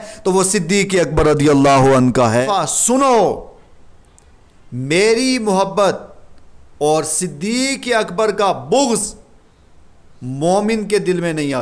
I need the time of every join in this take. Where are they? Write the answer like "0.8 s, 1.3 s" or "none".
2.4 s